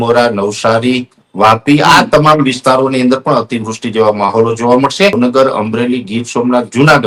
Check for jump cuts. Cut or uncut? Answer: cut